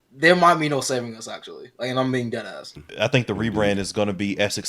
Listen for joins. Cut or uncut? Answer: cut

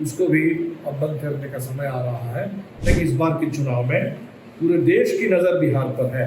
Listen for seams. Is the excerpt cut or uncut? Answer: cut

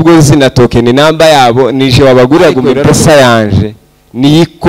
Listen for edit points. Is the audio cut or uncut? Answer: cut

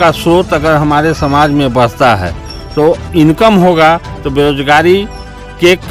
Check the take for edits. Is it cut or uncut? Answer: uncut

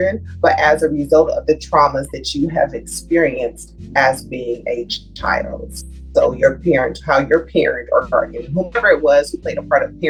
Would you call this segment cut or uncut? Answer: uncut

